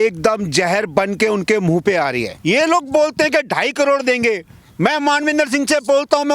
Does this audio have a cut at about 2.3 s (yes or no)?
yes